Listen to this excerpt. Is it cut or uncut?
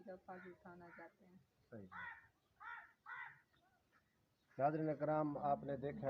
uncut